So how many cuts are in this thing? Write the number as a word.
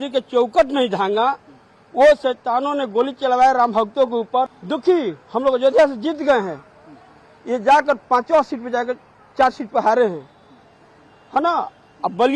zero